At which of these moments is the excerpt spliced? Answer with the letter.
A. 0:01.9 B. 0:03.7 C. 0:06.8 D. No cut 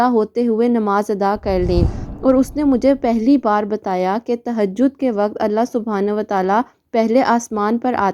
A